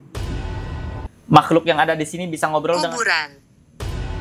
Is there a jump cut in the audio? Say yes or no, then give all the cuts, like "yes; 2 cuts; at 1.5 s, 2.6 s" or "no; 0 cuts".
yes; 1 cut; at 1.1 s